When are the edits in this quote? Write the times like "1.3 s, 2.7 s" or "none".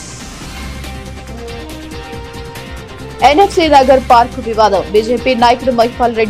none